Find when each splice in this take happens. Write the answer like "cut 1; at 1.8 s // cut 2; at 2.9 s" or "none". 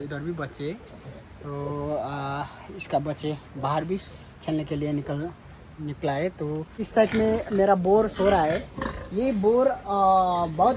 cut 1; at 6.8 s